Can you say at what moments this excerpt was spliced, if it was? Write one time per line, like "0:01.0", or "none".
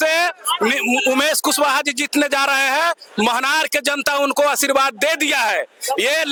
none